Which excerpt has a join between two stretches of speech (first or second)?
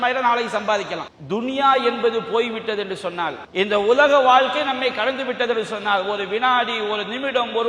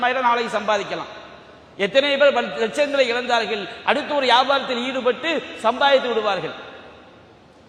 first